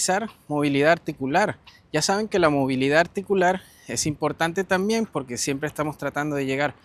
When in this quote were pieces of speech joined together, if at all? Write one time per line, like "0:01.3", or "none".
none